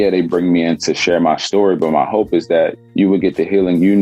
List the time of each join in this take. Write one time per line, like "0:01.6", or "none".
0:02.8